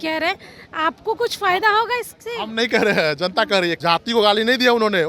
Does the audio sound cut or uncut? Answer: cut